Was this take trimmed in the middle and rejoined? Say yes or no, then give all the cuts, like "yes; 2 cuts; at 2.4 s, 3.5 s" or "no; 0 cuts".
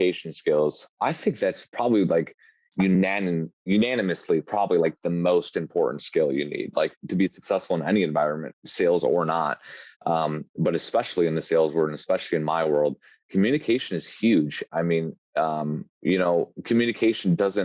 no; 0 cuts